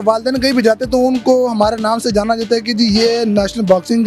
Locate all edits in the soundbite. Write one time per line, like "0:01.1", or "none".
none

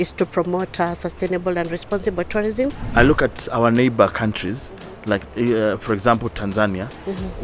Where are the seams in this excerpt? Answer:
0:02.8

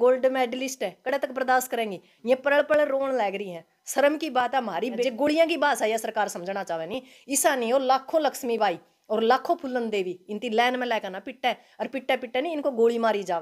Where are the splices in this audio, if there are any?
0:05.0

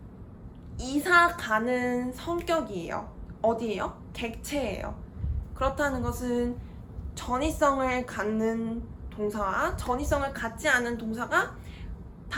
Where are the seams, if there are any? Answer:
none

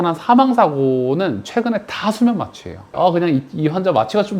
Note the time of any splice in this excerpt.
0:03.0

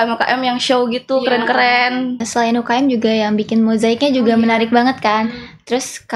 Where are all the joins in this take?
0:02.3

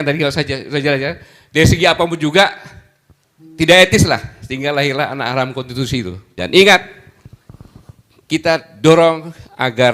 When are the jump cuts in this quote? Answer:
0:06.2

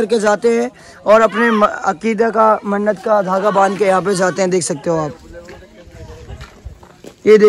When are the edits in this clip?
none

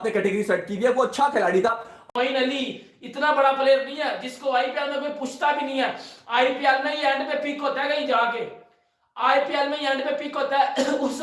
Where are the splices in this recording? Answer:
0:02.0

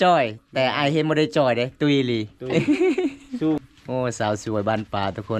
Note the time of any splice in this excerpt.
0:03.6

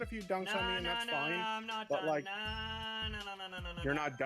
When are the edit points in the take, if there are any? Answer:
none

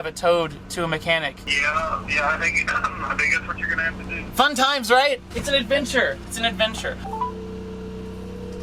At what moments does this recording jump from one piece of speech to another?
0:01.4
0:04.2
0:07.0

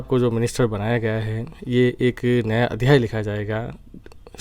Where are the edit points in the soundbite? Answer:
none

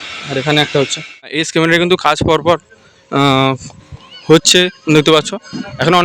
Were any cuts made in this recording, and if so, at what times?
0:01.4

